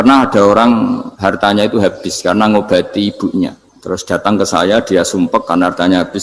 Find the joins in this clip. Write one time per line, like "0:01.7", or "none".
0:01.1
0:03.7

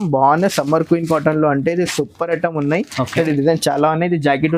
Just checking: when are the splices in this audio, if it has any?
none

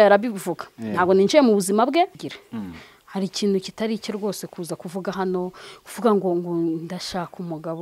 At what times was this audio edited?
0:02.2

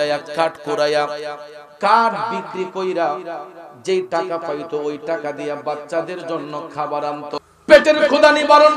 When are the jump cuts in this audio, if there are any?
0:07.4

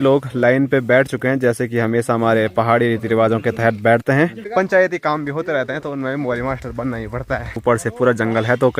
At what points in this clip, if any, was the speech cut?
0:04.4
0:07.6

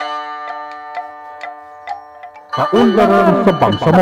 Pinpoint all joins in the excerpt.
0:02.6

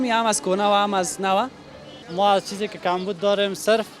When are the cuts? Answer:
0:02.0

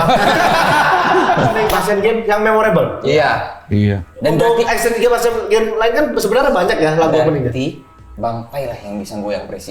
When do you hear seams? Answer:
0:01.7

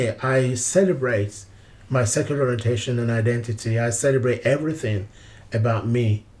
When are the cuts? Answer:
none

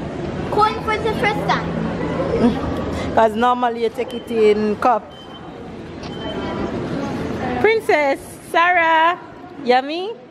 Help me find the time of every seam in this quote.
none

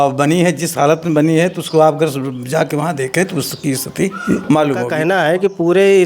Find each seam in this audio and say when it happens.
0:04.9

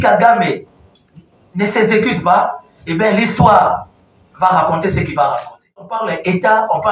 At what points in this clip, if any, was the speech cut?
0:06.0

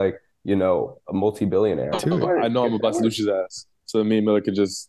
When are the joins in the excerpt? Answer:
0:01.9

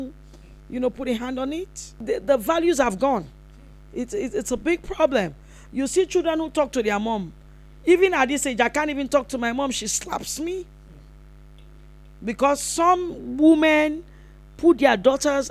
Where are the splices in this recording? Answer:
0:01.9

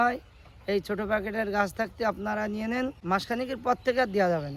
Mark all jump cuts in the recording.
0:03.0

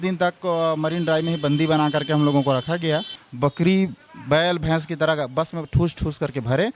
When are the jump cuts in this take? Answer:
0:03.2

